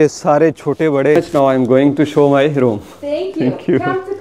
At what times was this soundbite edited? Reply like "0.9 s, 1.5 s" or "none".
1.2 s